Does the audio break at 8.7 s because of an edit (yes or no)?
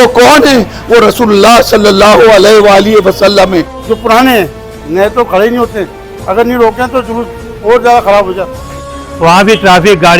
yes